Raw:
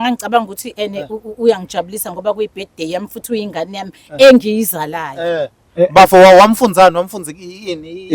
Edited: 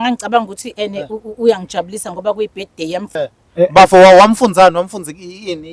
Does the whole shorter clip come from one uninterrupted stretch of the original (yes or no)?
no